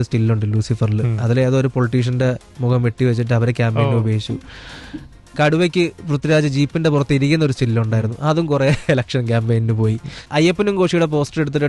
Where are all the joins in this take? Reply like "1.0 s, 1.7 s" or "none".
10.3 s

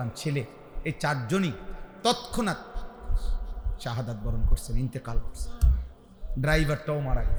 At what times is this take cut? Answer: none

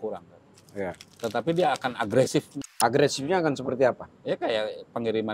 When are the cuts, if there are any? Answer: 2.6 s

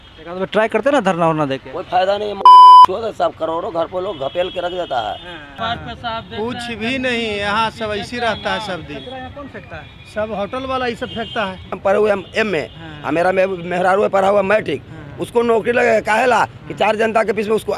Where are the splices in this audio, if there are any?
5.5 s, 11.8 s

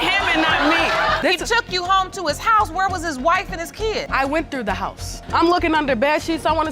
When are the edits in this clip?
1.2 s

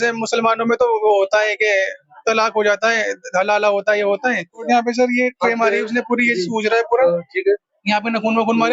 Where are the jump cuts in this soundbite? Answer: 4.6 s

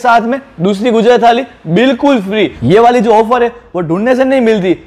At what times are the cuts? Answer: 2.6 s

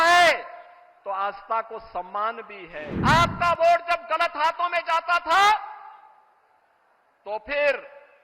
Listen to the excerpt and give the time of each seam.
2.9 s

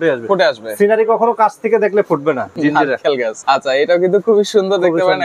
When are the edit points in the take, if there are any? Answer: 2.5 s, 3.4 s

